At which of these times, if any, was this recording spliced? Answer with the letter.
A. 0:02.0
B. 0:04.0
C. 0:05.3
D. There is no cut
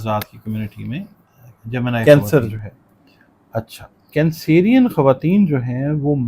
A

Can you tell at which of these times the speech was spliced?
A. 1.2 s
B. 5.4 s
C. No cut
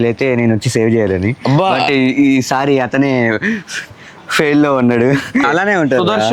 B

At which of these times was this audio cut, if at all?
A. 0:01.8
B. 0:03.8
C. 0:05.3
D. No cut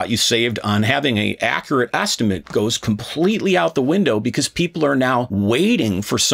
C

